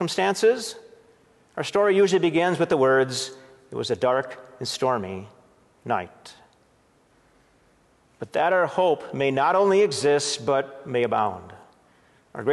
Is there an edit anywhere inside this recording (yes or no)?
yes